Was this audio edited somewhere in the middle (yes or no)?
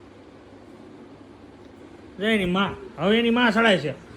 no